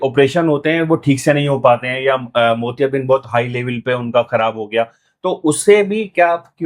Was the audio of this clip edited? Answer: no; 0 cuts

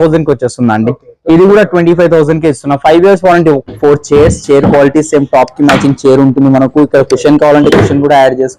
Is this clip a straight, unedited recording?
no; 1 cut; at 3.6 s

